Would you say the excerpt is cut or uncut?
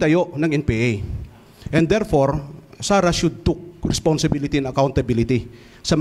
uncut